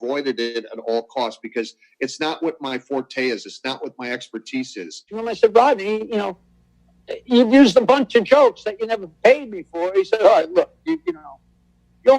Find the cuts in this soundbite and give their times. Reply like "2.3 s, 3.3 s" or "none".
5.1 s

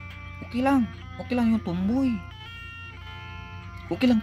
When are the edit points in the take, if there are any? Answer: none

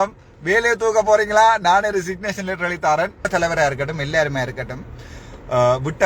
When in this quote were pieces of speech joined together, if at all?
3.3 s

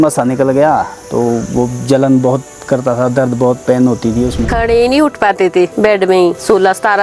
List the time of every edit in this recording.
4.5 s

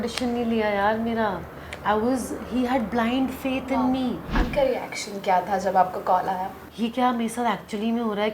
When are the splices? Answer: 4.3 s, 6.6 s

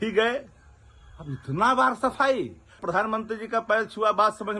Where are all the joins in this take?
2.8 s

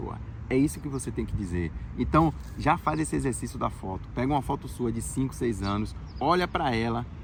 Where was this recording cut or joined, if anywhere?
none

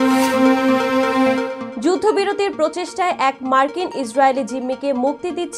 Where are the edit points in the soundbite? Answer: 1.6 s

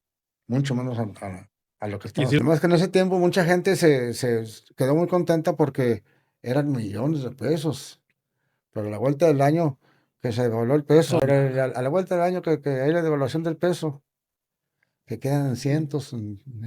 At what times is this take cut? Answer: 2.4 s, 11.2 s

